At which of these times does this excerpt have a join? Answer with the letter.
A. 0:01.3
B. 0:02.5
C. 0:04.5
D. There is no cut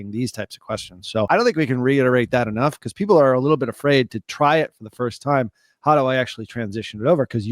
A